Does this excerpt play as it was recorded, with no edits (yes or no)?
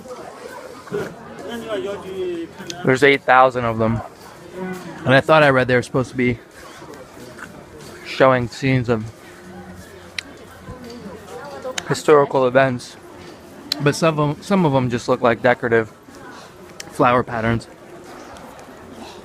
yes